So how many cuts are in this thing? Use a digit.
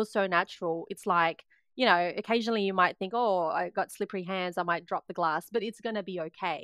0